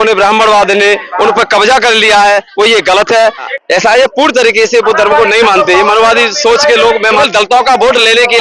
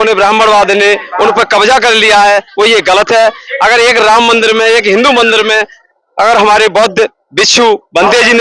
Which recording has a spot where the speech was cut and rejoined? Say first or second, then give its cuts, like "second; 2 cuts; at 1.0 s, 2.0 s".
first; 2 cuts; at 3.5 s, 7.2 s